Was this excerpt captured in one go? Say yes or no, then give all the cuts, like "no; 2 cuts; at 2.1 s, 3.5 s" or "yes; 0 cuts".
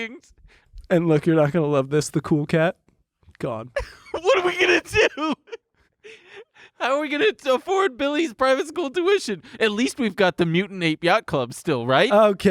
no; 1 cut; at 3.6 s